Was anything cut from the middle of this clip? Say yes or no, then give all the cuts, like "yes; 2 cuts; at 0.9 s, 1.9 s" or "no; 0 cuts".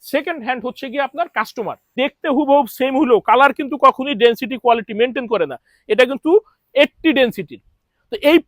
yes; 1 cut; at 1.9 s